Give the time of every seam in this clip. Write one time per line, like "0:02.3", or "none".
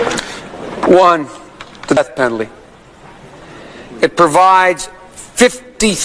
0:02.0